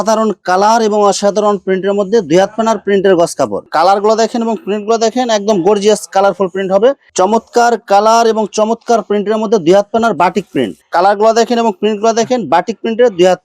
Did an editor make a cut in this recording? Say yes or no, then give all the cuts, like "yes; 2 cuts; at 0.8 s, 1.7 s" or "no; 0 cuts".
yes; 3 cuts; at 3.6 s, 7.0 s, 10.8 s